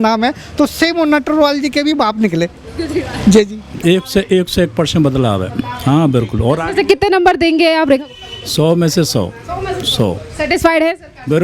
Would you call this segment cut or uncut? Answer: cut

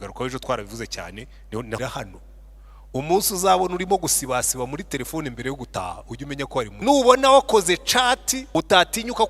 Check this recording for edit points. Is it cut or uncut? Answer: cut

